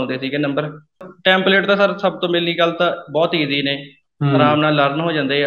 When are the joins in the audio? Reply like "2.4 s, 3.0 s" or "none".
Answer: 1.0 s